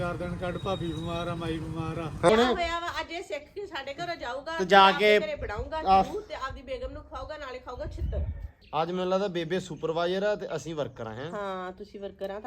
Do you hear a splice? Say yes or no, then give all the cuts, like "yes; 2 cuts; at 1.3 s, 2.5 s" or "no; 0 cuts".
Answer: yes; 2 cuts; at 2.3 s, 8.6 s